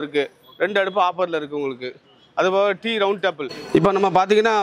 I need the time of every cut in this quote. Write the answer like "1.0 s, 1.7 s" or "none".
3.5 s